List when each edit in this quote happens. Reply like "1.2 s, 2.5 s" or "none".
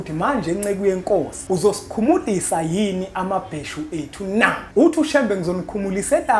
1.4 s, 4.6 s